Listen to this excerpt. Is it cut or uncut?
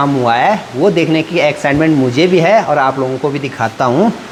uncut